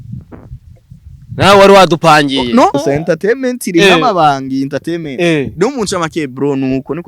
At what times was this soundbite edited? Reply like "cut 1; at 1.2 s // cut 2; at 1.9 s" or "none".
cut 1; at 2.8 s